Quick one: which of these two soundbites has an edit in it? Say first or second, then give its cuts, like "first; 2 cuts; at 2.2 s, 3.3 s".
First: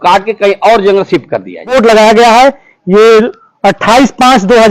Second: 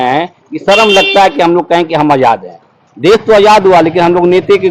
first; 1 cut; at 1.7 s